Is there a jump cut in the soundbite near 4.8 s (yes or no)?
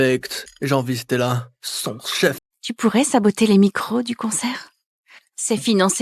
no